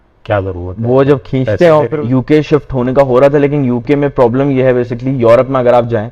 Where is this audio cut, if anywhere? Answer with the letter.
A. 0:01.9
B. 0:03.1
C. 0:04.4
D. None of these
A